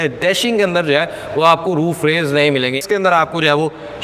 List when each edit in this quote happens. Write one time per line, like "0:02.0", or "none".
0:02.8